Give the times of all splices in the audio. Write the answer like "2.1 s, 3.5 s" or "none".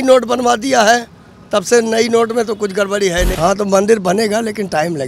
3.3 s